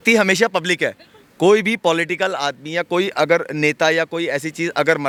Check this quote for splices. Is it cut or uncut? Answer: uncut